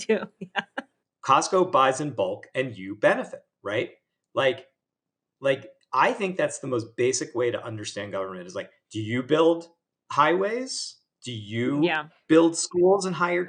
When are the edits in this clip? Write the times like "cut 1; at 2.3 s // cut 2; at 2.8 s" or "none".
cut 1; at 0.9 s